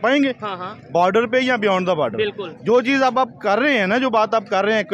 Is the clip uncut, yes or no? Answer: yes